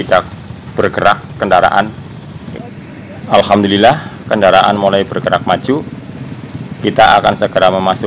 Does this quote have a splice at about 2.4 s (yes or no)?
yes